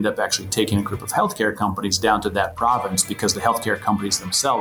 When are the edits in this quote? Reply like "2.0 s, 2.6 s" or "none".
none